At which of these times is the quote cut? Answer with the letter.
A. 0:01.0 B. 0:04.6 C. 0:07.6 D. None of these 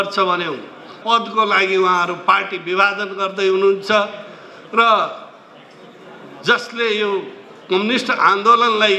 A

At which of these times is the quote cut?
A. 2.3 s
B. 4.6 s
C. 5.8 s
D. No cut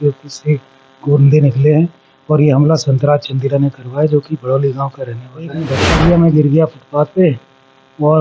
C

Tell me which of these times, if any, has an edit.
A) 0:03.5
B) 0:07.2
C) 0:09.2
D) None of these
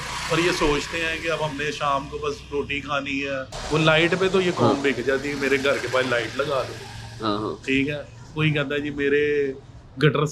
A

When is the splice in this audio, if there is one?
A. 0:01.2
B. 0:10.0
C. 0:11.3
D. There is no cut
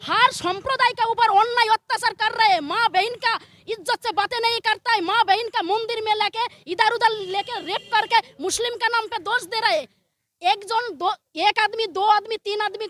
D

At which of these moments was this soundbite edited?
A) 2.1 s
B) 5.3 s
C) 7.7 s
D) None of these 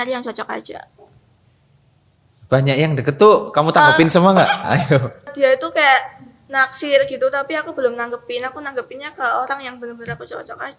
B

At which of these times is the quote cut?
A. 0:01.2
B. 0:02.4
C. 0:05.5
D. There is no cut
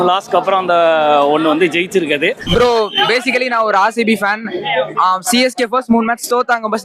B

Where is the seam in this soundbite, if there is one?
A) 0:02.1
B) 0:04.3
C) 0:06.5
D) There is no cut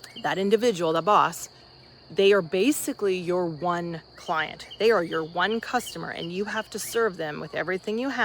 A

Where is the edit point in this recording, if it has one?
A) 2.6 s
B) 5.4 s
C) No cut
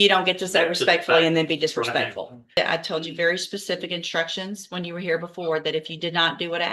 A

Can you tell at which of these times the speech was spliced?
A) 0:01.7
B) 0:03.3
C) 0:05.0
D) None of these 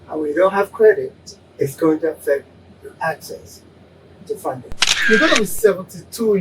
C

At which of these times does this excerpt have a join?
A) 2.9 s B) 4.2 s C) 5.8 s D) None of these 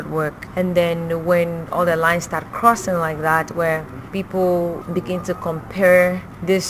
D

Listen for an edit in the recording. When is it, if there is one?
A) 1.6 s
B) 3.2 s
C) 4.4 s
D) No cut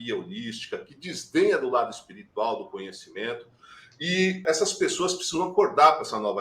C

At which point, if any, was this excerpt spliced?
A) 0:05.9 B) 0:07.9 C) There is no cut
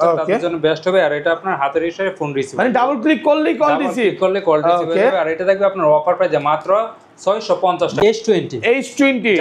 B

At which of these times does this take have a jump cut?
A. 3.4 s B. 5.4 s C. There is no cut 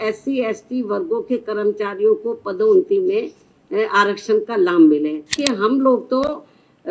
B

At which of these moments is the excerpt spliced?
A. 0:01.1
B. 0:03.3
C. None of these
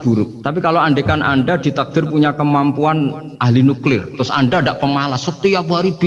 B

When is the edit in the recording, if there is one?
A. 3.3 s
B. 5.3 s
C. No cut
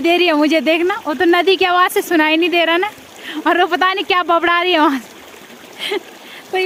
C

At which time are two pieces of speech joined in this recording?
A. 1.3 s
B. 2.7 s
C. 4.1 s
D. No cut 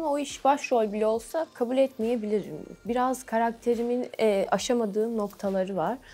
D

